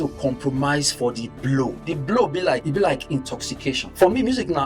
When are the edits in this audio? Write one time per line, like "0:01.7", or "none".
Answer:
0:02.6
0:03.8